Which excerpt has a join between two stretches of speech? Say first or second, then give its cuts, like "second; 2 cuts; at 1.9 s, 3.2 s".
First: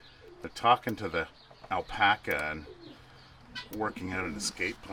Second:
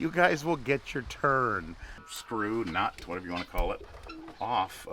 second; 1 cut; at 2.0 s